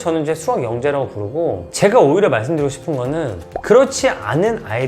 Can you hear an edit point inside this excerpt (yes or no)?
yes